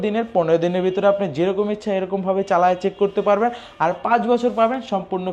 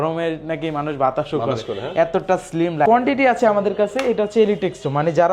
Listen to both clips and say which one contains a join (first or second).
second